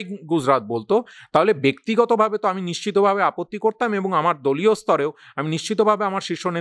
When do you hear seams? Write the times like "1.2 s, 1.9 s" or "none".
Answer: none